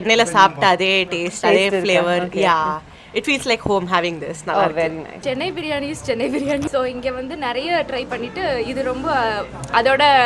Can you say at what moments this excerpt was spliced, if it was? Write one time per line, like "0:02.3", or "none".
0:05.2
0:06.6